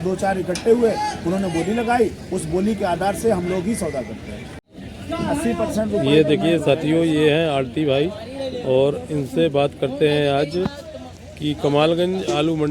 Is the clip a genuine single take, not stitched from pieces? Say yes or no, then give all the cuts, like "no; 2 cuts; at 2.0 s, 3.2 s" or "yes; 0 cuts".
no; 1 cut; at 4.5 s